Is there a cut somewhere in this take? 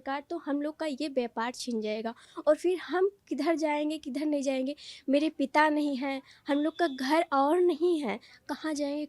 no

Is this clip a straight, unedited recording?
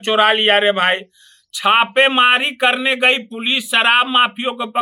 yes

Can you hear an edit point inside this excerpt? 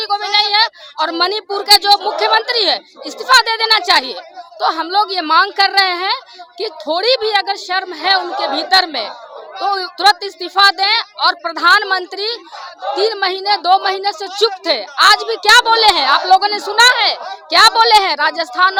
no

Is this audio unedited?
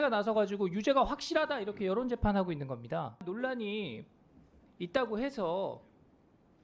no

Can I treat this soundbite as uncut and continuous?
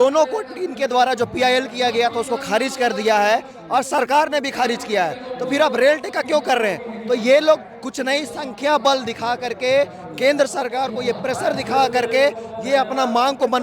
yes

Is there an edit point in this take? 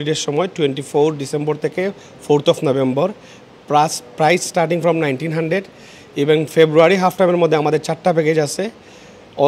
no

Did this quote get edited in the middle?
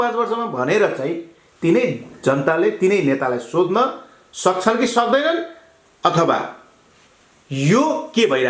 no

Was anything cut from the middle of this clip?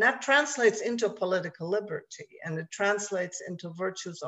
no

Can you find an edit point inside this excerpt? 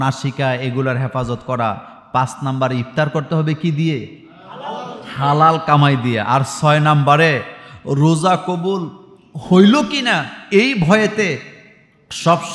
no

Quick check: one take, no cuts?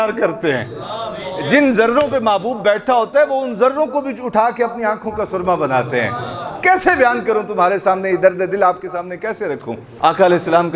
no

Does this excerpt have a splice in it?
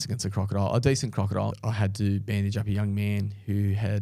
yes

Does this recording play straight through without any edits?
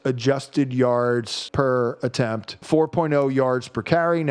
no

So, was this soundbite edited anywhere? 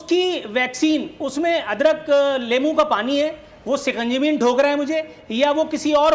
no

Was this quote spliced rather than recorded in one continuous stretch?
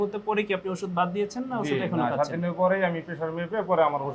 no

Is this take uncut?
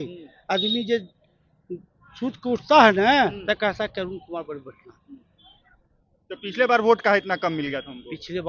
yes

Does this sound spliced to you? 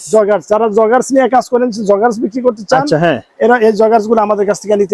no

